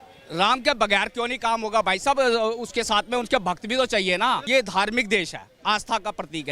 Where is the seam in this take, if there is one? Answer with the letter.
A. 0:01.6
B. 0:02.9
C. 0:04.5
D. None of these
C